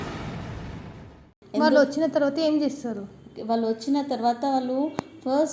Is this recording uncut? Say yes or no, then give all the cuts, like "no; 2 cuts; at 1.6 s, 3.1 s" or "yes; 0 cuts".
no; 1 cut; at 1.3 s